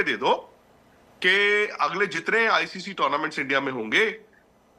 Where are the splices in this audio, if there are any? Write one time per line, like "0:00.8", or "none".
none